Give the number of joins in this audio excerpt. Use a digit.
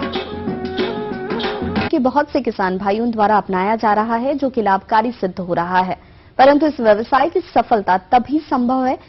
0